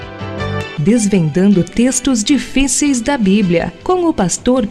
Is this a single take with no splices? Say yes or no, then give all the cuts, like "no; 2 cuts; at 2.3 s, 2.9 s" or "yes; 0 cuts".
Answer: yes; 0 cuts